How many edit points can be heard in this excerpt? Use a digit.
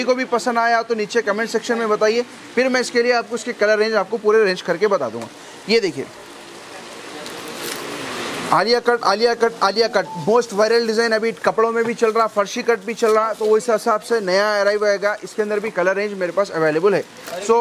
0